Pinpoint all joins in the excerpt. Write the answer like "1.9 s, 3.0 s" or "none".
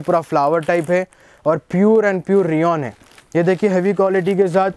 none